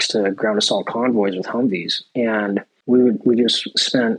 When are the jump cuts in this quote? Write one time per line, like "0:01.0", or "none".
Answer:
0:02.7